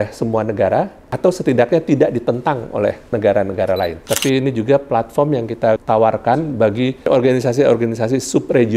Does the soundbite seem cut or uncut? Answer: cut